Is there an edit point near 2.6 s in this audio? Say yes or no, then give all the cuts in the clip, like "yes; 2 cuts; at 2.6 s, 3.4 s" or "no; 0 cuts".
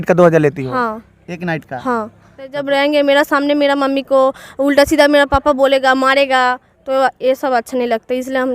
yes; 1 cut; at 2.6 s